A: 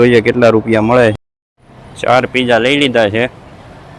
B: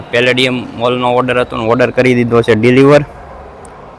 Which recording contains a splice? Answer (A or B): A